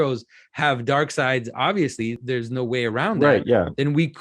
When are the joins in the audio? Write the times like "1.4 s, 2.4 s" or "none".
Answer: 2.2 s